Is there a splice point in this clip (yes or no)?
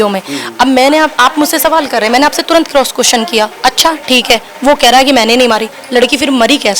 no